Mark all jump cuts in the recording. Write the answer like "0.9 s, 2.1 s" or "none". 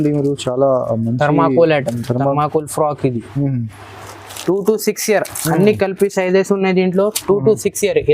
4.3 s